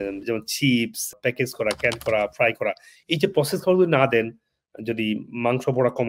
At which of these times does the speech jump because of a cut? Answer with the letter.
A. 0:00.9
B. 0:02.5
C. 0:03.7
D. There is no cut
D